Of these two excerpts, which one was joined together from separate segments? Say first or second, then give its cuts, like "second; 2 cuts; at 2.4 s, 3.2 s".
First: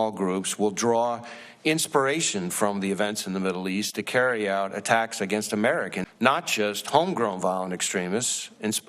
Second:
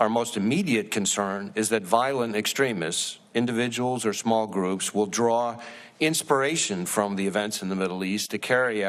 first; 1 cut; at 6.0 s